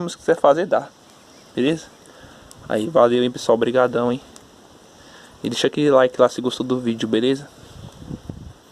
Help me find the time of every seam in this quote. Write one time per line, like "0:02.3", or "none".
none